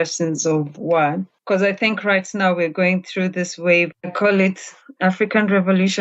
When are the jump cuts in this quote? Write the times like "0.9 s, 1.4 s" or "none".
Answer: 3.9 s